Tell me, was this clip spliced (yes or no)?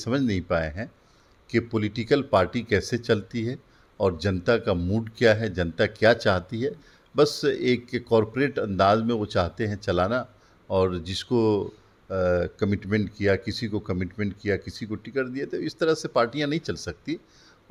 no